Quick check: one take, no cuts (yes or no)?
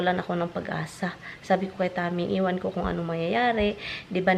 yes